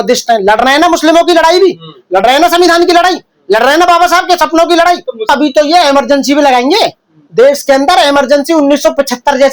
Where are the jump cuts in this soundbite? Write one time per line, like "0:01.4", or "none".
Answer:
0:05.3